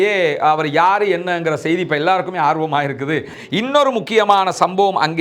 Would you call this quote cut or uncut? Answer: cut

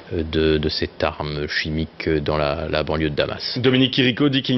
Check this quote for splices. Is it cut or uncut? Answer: cut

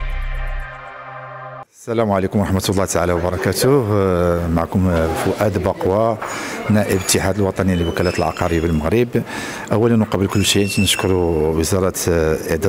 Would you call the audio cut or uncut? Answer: cut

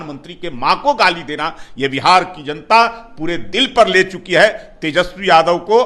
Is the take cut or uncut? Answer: uncut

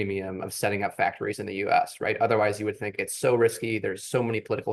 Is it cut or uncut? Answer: uncut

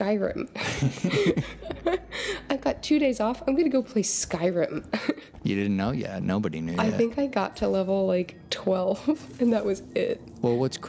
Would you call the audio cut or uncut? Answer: cut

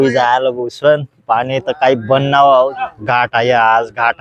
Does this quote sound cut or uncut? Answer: cut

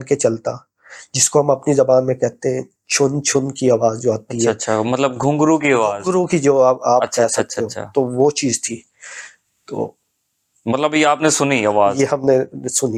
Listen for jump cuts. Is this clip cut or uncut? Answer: uncut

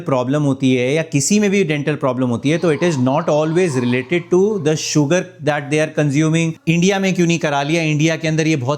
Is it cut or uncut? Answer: cut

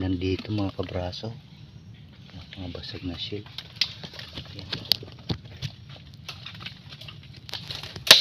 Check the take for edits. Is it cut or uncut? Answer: uncut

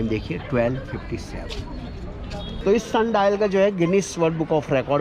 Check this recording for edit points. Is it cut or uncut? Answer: cut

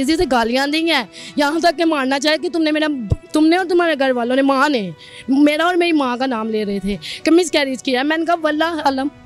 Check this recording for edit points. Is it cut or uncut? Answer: uncut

